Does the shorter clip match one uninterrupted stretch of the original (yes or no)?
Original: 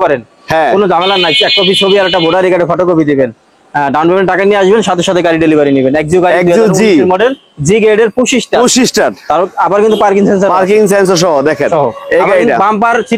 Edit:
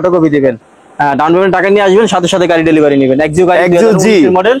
yes